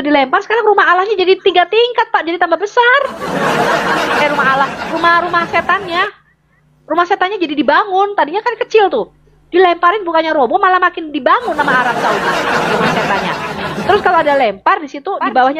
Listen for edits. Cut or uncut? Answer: uncut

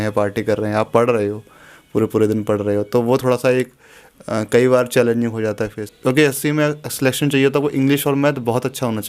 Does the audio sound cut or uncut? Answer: cut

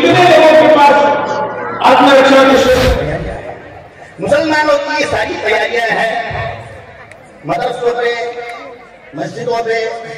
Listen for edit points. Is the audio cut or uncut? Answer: cut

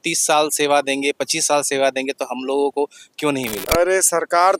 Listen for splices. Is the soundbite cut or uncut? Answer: uncut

